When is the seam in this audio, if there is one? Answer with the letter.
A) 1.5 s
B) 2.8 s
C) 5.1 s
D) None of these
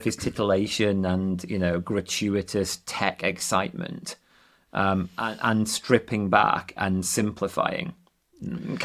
D